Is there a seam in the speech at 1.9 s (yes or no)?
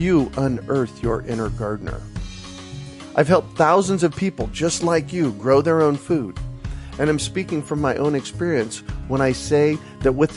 no